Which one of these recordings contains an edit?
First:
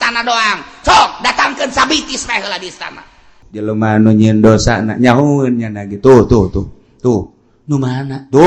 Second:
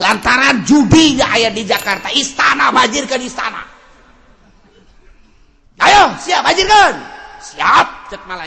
first; 1 cut; at 3.5 s

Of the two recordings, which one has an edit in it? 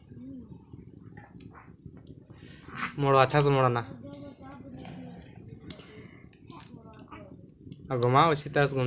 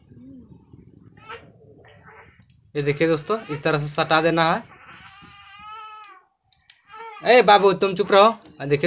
second; 2 cuts; at 1.2 s, 6.9 s

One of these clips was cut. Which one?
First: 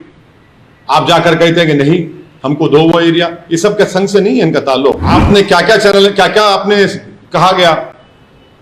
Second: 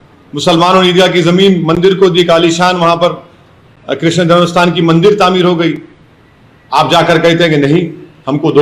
first; 1 cut; at 5.0 s

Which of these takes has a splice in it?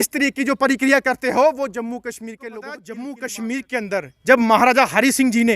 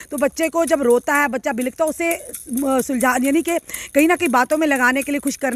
first; 1 cut; at 2.4 s

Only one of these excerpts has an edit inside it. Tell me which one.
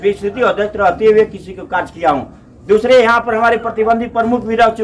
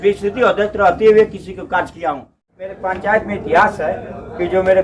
second; 1 cut; at 2.7 s

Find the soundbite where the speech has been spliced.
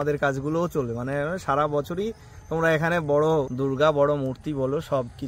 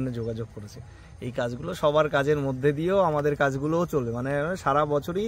first; 1 cut; at 3.5 s

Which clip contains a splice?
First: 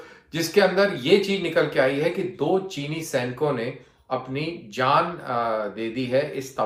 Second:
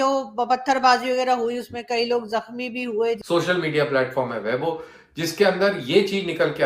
second; 1 cut; at 3.2 s

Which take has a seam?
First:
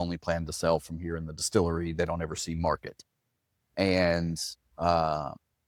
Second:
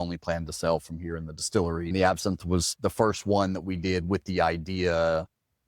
second; 1 cut; at 1.9 s

